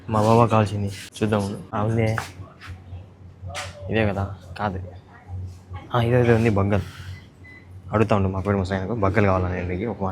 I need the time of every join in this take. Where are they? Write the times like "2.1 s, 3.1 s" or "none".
1.0 s, 1.6 s